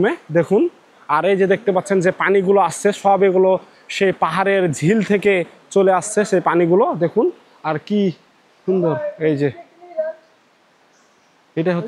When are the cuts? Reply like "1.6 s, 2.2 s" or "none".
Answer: none